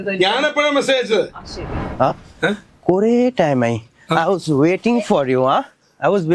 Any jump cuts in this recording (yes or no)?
yes